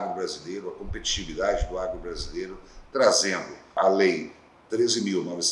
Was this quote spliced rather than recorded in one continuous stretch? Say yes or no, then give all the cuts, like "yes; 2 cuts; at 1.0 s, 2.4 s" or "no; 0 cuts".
yes; 1 cut; at 3.8 s